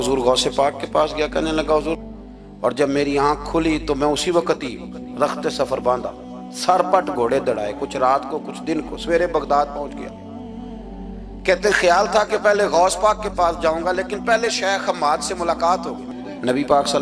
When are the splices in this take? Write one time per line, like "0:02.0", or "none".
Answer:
0:02.0
0:16.0